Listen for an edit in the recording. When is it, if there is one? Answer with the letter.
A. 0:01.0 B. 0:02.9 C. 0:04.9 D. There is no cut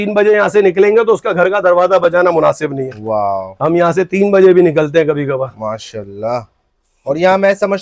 D